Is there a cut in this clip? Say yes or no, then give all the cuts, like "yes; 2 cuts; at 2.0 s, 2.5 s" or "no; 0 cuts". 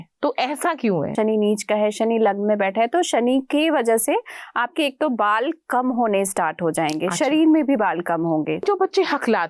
yes; 2 cuts; at 1.1 s, 8.6 s